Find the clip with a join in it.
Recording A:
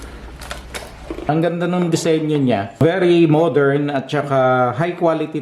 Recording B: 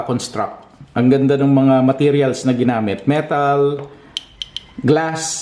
A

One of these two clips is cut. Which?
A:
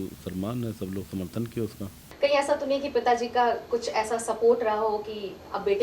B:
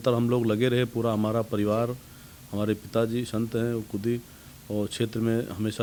A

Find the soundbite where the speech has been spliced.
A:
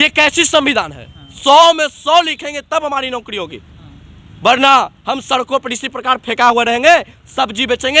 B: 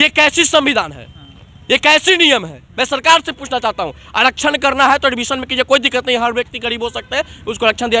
A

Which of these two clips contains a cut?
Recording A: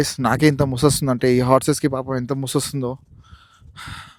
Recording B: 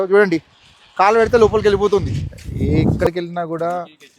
B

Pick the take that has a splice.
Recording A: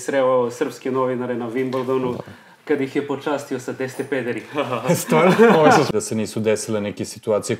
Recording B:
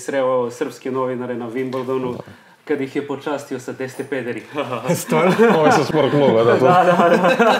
A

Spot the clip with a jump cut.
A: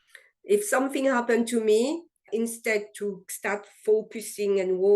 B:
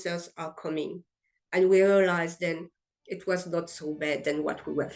A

